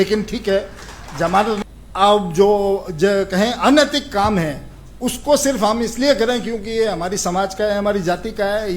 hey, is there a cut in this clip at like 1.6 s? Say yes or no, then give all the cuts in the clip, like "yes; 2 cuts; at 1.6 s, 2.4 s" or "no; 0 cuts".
yes; 1 cut; at 1.6 s